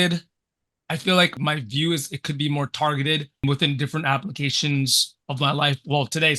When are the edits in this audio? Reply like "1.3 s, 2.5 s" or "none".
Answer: 1.4 s, 3.4 s